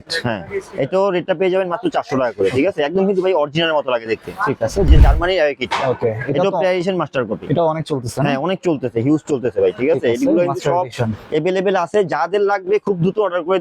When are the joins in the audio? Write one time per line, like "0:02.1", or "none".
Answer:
0:04.9